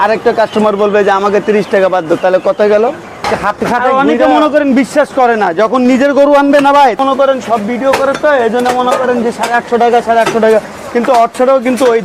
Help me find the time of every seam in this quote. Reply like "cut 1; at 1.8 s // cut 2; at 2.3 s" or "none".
cut 1; at 3.2 s // cut 2; at 7.0 s